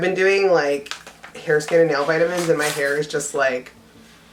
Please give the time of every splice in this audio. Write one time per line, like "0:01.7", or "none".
none